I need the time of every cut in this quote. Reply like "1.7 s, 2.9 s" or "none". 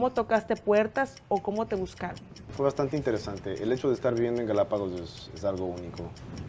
2.4 s